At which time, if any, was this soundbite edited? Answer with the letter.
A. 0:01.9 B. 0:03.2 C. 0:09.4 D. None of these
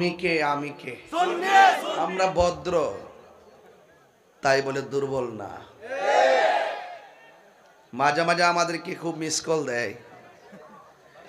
A